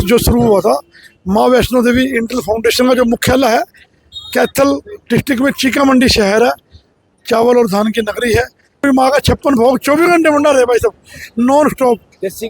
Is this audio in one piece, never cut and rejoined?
no; 1 cut; at 8.8 s

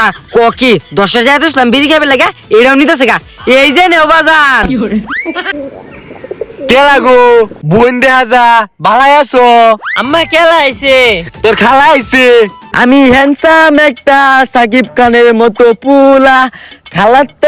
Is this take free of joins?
no; 2 cuts; at 5.5 s, 12.6 s

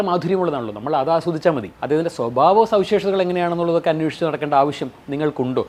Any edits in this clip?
no; 0 cuts

